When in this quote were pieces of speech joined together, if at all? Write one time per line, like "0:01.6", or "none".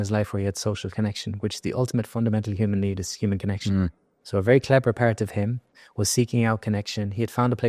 none

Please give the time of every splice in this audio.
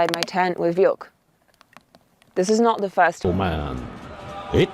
0:03.2

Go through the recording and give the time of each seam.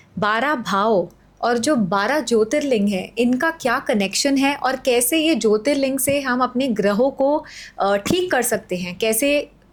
none

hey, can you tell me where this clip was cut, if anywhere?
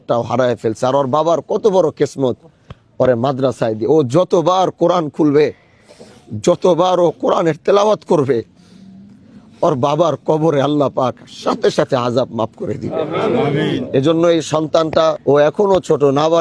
0:15.2

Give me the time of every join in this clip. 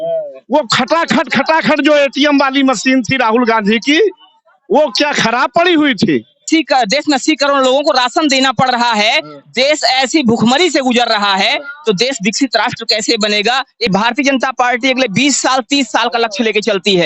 0:06.4
0:13.9

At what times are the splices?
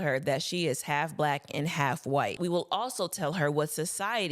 0:02.4

